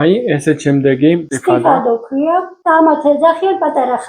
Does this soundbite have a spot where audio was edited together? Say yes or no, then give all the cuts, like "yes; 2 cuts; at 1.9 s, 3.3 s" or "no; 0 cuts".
yes; 1 cut; at 1.3 s